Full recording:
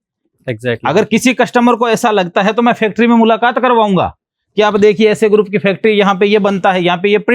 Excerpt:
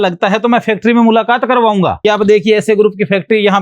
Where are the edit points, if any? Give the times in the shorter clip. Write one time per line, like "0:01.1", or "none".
0:02.0